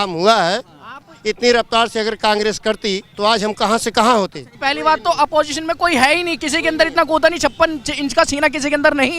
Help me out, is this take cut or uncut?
cut